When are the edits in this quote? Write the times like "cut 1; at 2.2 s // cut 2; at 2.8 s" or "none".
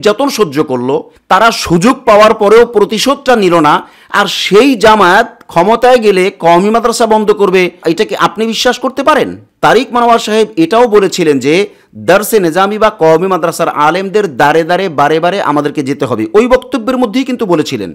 cut 1; at 9.5 s